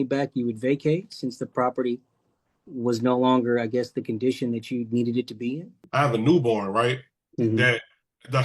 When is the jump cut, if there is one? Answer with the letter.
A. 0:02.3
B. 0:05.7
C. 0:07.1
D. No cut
B